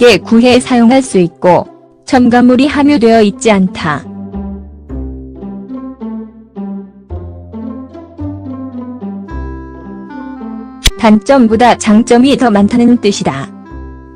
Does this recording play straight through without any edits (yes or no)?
yes